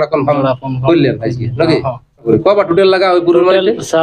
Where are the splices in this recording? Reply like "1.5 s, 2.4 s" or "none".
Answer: 2.2 s